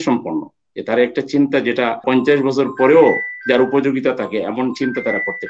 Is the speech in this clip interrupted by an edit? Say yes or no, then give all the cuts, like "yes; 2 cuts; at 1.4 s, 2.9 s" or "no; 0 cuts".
no; 0 cuts